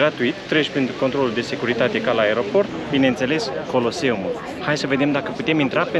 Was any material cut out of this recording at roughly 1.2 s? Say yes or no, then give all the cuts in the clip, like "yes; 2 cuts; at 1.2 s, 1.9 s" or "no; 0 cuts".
no; 1 cut; at 2.7 s